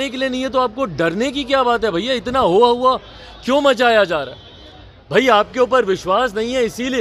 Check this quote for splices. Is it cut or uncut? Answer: uncut